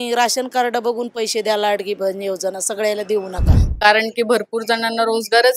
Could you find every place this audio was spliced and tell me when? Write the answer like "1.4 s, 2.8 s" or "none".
3.6 s